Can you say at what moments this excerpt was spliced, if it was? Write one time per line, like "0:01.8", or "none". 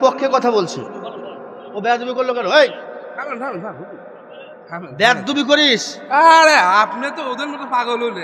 0:04.6